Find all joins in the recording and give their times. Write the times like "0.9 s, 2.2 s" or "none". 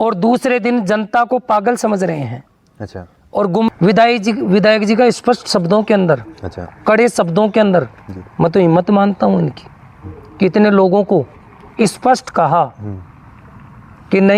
3.7 s